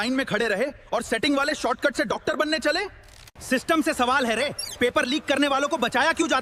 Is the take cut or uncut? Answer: cut